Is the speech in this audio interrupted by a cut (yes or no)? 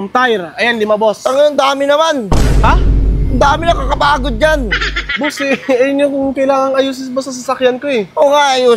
no